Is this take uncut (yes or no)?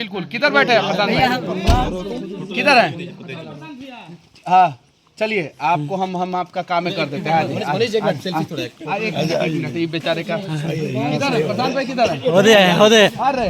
yes